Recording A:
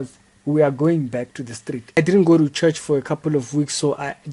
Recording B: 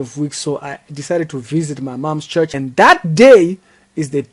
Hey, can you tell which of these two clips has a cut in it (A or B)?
A